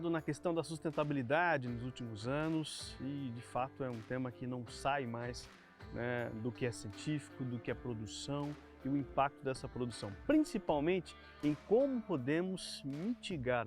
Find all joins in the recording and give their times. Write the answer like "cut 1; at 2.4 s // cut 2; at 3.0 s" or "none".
none